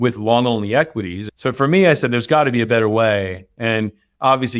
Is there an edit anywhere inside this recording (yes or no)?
yes